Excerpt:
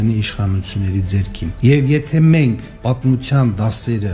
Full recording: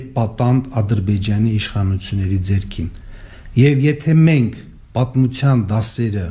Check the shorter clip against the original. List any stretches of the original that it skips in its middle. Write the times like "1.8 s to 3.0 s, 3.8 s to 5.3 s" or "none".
2.9 s to 3.5 s, 4.6 s to 4.8 s